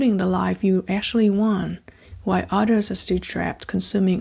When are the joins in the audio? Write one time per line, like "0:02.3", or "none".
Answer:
none